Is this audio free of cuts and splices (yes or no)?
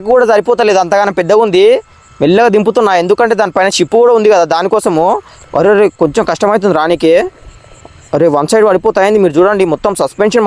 yes